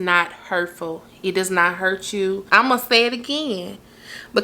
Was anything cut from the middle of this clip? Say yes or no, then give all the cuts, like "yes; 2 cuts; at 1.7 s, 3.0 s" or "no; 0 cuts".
yes; 1 cut; at 2.4 s